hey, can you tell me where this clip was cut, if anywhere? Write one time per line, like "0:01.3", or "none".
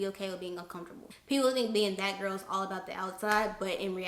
0:01.0